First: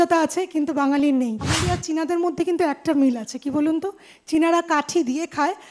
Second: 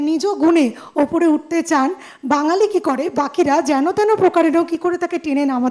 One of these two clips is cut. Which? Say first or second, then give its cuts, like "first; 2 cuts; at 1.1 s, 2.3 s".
first; 1 cut; at 1.5 s